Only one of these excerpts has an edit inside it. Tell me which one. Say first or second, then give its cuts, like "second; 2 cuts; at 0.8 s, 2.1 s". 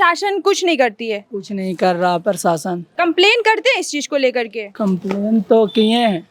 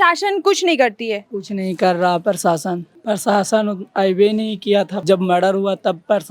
second; 2 cuts; at 2.8 s, 5.0 s